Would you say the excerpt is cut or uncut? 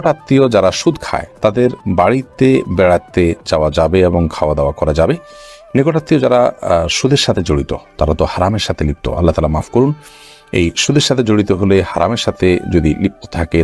uncut